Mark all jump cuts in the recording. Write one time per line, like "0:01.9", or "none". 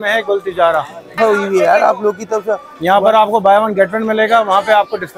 0:01.2